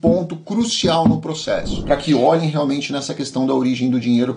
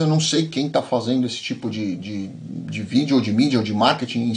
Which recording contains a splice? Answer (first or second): first